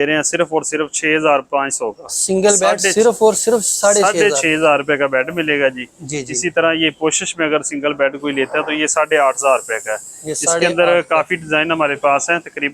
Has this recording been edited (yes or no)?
no